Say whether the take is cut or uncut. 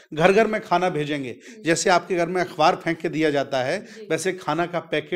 uncut